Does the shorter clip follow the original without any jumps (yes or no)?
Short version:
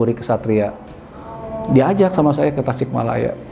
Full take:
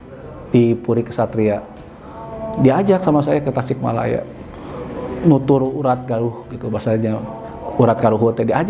yes